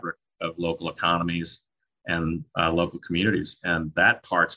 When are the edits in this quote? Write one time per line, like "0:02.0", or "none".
none